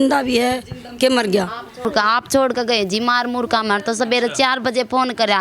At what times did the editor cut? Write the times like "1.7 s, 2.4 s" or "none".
1.9 s